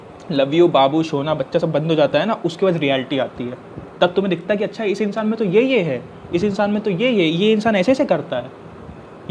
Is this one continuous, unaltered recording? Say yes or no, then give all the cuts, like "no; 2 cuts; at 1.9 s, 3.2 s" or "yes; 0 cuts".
yes; 0 cuts